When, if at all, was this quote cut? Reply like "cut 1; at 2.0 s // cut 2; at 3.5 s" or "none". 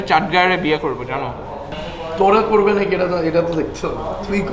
cut 1; at 1.7 s